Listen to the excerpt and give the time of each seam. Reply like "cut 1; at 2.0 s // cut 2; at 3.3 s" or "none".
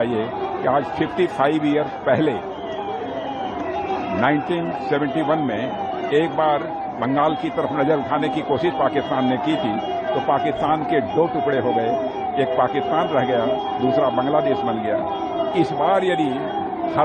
none